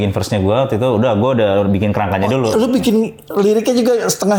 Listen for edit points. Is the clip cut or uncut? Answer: uncut